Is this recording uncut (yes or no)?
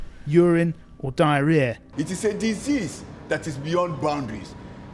no